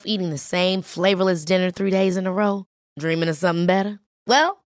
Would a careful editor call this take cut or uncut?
uncut